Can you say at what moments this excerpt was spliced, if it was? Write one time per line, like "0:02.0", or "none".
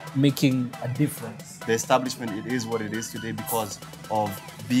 0:01.6